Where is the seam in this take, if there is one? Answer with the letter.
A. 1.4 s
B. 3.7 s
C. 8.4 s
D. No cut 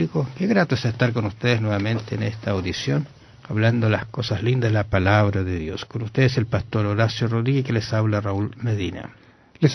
D